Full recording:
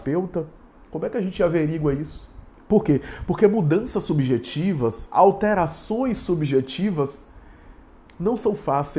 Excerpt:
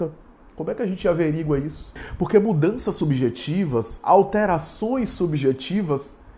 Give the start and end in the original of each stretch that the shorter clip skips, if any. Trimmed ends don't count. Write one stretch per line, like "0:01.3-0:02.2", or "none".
0:02.4-0:03.1